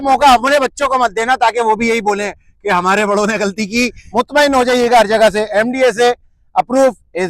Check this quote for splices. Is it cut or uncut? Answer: cut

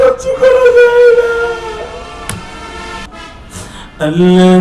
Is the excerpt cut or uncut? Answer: cut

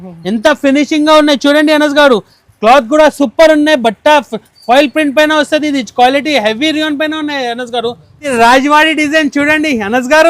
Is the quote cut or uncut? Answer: cut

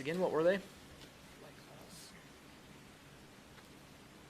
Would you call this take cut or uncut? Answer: uncut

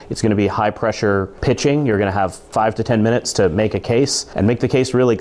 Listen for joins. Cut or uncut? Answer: cut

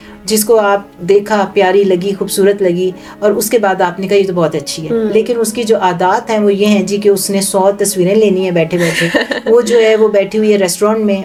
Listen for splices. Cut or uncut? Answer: uncut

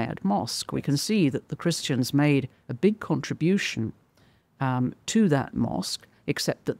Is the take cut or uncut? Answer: uncut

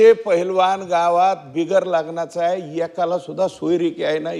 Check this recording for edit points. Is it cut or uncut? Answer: uncut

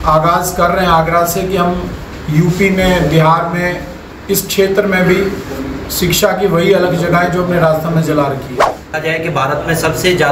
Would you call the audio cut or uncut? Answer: cut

